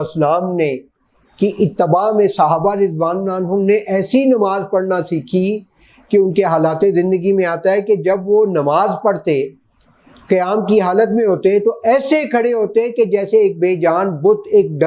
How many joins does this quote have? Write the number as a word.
zero